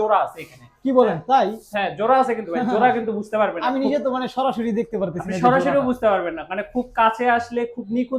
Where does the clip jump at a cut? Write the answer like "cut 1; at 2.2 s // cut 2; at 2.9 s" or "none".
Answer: none